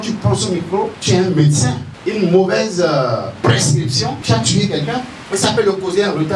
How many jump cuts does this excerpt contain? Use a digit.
4